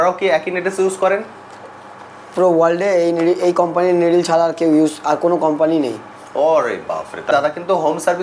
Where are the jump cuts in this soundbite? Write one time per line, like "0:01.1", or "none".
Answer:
0:07.3